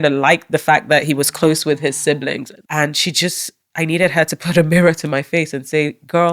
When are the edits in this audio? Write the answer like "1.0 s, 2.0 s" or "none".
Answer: 2.5 s